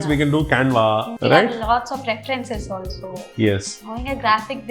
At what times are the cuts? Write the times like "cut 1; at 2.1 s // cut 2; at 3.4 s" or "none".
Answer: none